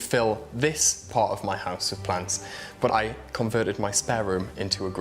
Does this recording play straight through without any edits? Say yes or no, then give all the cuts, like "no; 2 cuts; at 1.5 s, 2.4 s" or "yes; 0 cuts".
no; 1 cut; at 2.9 s